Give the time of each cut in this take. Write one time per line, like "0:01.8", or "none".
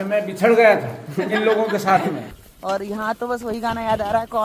0:02.3